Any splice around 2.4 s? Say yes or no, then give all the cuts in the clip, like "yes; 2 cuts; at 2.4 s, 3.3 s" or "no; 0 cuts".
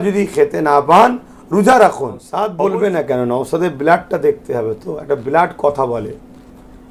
yes; 1 cut; at 2.4 s